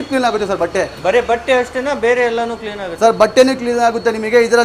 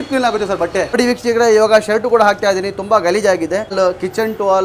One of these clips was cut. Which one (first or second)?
second